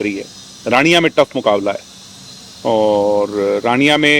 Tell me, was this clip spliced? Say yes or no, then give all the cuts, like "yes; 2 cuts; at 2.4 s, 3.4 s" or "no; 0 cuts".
no; 0 cuts